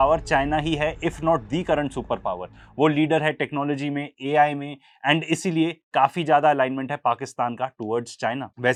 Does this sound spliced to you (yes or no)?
no